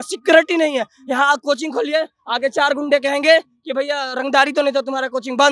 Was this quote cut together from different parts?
no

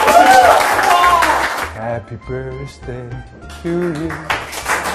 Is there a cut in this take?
yes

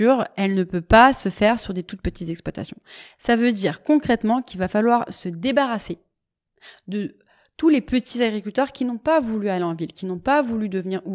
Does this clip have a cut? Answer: no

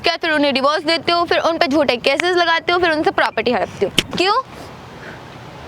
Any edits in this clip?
yes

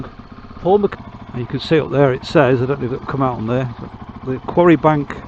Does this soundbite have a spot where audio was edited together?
yes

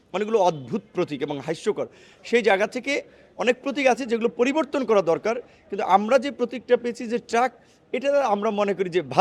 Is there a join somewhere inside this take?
no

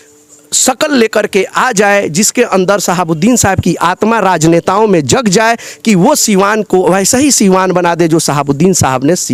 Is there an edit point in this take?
no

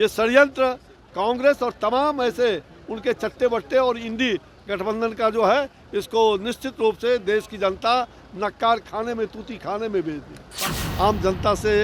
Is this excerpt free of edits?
no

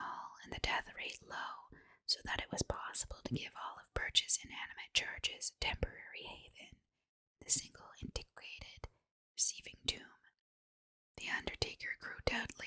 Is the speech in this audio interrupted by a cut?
no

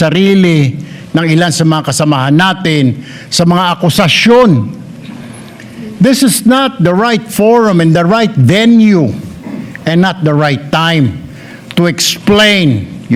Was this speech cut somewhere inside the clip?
no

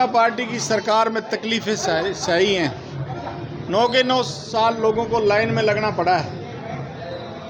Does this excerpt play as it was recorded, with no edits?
yes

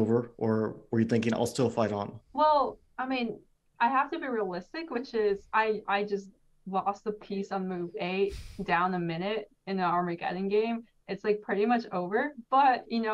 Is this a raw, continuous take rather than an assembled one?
yes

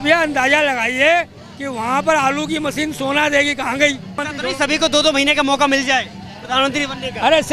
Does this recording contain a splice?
yes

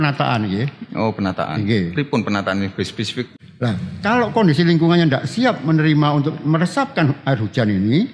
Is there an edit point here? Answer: yes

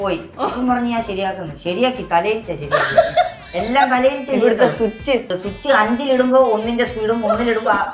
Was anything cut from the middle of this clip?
yes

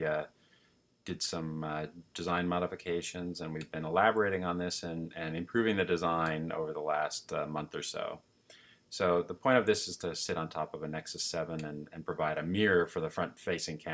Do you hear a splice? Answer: no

